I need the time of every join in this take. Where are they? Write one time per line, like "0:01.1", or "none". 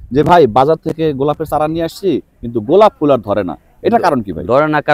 none